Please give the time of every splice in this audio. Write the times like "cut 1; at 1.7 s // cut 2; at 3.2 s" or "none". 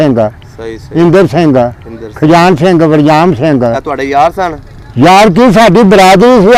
none

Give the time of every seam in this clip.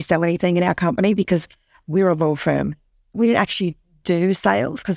cut 1; at 3.1 s

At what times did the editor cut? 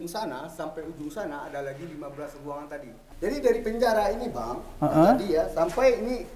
cut 1; at 3.1 s

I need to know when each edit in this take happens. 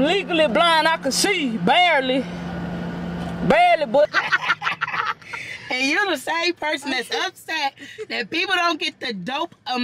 cut 1; at 4.0 s

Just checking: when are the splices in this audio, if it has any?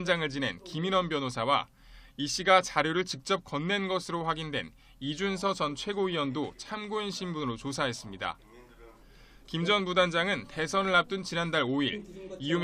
cut 1; at 10.0 s

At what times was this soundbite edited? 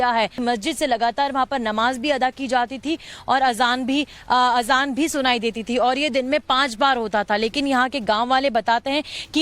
cut 1; at 3.5 s

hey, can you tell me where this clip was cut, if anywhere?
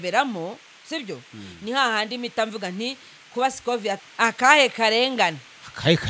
cut 1; at 4.0 s

